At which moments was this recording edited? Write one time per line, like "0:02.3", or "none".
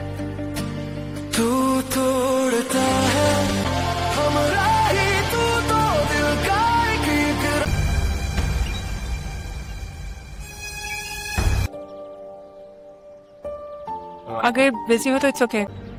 none